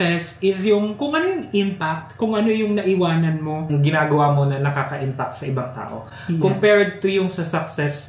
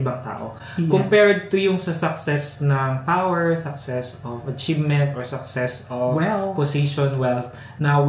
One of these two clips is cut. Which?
first; 1 cut; at 3.7 s

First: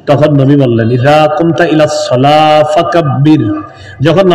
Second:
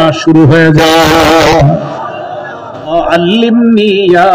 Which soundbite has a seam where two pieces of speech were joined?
second; 1 cut; at 2.9 s

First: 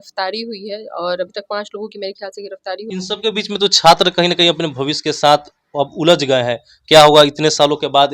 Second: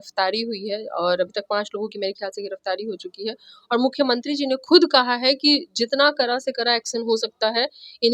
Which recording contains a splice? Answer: first; 1 cut; at 2.9 s

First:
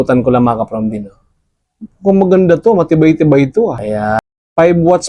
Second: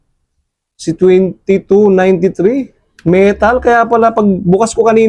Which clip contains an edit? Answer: first; 1 cut; at 4.2 s

